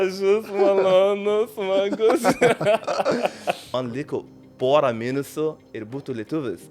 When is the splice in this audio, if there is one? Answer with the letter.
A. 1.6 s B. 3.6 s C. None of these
B